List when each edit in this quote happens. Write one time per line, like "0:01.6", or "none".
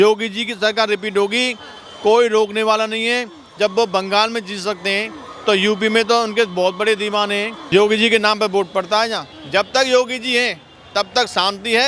0:07.5
0:09.3